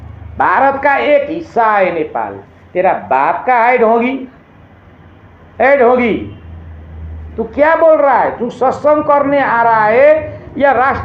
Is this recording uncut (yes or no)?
yes